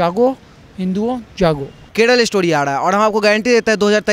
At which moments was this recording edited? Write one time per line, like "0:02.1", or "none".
0:01.8